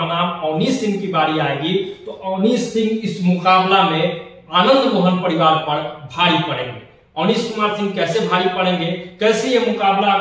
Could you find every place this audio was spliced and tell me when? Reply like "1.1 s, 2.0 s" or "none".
none